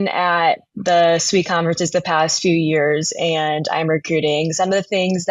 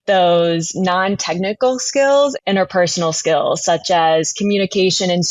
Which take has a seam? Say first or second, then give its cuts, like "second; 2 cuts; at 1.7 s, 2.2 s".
second; 1 cut; at 2.4 s